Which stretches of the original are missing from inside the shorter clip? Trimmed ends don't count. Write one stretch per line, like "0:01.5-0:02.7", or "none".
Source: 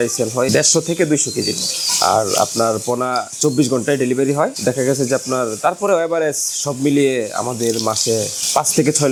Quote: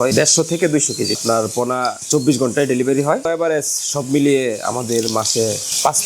0:01.6-0:02.5
0:04.6-0:06.0

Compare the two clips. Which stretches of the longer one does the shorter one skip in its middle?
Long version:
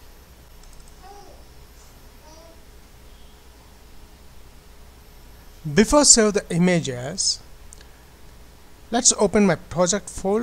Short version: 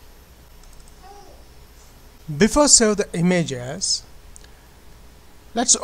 0:02.2-0:05.5

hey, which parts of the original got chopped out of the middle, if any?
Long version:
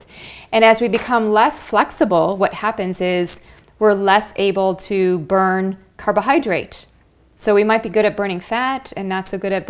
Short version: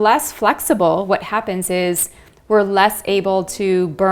none

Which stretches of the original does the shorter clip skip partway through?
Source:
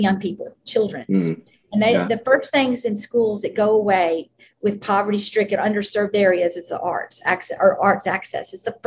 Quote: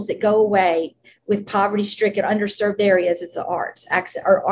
none

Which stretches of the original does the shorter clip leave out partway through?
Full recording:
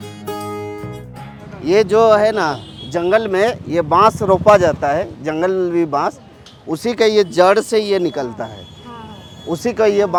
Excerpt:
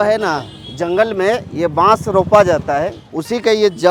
0:05.1-0:06.5

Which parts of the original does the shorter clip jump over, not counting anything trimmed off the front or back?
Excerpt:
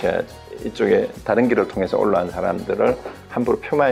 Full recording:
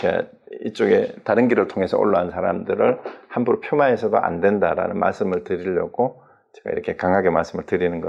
none

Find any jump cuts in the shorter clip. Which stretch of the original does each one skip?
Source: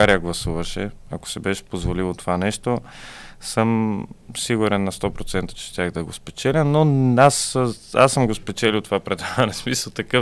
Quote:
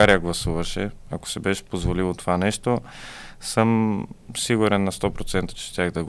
none

